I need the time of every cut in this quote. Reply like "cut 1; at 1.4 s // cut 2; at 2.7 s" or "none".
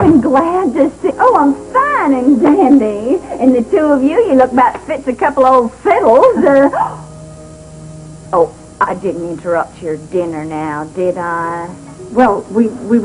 none